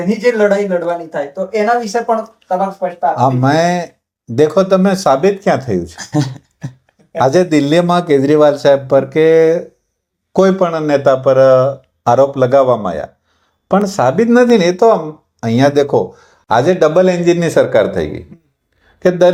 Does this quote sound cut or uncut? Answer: uncut